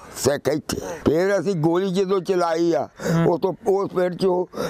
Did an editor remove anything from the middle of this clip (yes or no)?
yes